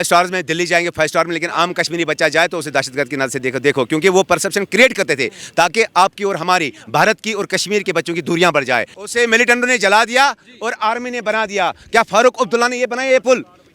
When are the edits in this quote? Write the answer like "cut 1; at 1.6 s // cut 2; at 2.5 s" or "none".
cut 1; at 9.0 s